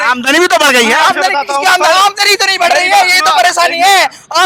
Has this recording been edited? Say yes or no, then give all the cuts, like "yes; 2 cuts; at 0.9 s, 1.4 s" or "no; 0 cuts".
no; 0 cuts